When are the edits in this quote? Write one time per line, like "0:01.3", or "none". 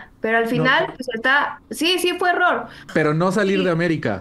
0:02.8